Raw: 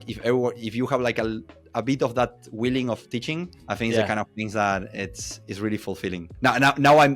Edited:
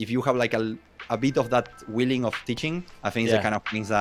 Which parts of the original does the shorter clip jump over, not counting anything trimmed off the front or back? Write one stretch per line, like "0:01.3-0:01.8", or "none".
none